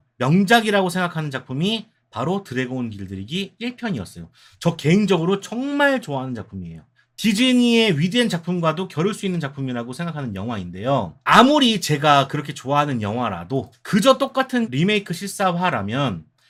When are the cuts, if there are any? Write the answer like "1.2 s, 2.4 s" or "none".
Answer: none